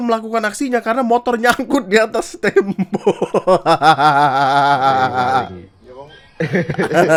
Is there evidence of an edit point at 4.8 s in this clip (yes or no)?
no